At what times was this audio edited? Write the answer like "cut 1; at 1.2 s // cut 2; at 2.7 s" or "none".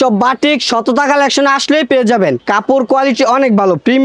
none